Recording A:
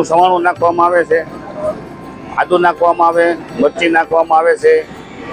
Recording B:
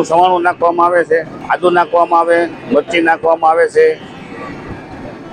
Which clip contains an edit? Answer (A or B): B